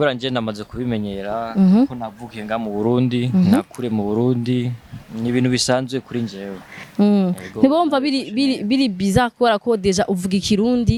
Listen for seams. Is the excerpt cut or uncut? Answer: uncut